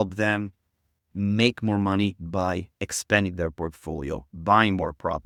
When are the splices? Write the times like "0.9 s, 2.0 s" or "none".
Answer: none